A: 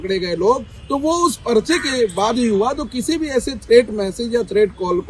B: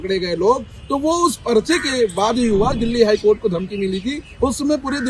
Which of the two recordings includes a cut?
B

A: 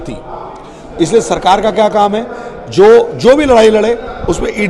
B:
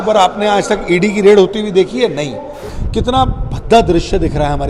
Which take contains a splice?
B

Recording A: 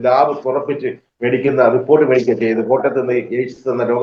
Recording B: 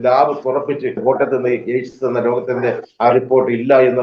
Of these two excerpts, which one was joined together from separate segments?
B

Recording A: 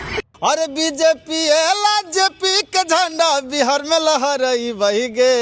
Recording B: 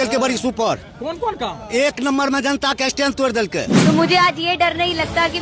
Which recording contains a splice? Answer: B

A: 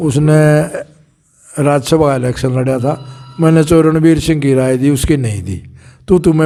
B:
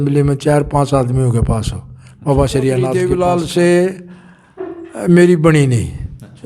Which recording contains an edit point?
B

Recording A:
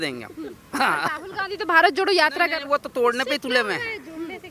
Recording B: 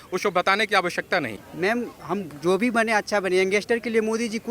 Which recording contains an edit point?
B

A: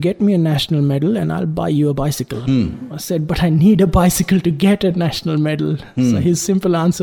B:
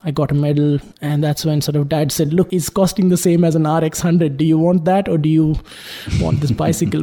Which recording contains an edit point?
B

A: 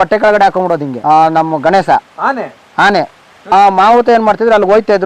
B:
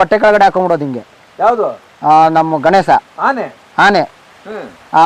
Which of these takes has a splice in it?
A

